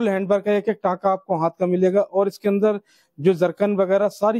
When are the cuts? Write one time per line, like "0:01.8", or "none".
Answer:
none